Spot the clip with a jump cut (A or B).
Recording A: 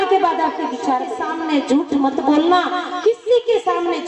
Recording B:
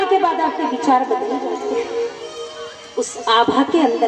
A